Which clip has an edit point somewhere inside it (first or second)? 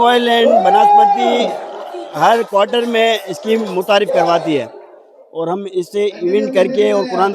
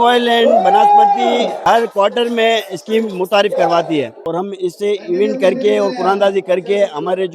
second